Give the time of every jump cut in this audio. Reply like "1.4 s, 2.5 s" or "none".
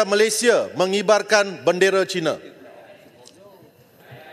none